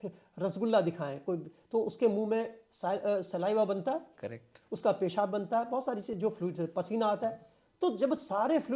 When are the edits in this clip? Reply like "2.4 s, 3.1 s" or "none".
none